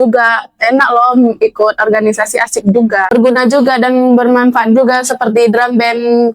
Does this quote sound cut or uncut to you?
cut